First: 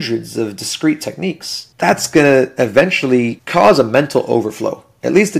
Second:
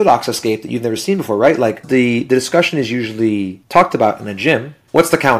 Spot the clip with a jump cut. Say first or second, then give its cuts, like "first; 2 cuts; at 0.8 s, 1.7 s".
second; 1 cut; at 1.8 s